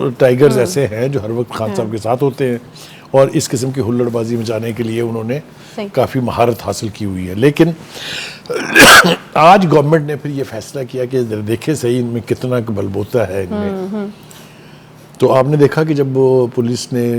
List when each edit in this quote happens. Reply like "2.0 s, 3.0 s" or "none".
none